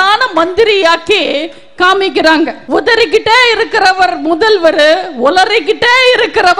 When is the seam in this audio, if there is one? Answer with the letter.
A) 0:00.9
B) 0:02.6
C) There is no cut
B